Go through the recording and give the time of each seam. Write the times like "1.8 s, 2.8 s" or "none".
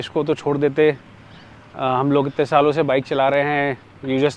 none

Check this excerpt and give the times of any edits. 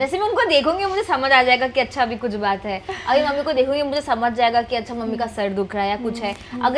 none

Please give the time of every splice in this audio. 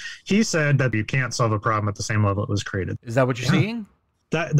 0.9 s, 2.9 s

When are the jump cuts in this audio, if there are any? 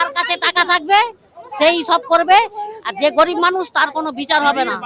none

